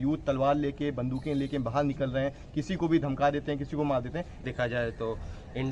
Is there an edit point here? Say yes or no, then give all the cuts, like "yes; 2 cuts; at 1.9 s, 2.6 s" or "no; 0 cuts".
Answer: yes; 1 cut; at 4.4 s